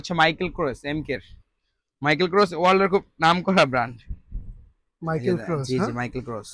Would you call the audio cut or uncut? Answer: uncut